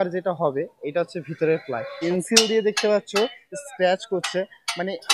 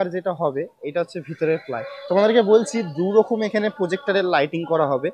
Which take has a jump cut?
first; 1 cut; at 2.1 s

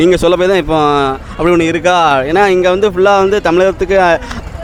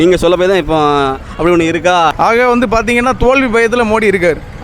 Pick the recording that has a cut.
second; 1 cut; at 2.1 s

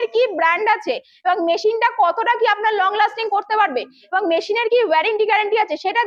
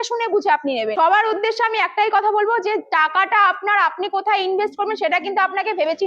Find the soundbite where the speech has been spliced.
second; 1 cut; at 0.9 s

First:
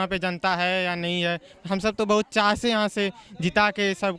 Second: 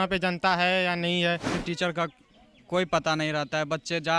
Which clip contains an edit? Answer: second; 1 cut; at 1.6 s

